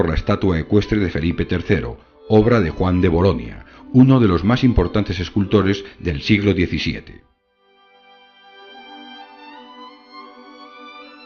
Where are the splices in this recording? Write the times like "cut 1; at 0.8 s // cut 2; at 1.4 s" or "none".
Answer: cut 1; at 10.2 s